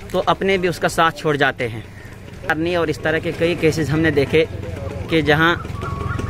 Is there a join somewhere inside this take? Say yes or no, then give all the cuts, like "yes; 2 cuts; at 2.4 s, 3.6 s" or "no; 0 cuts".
yes; 1 cut; at 2.5 s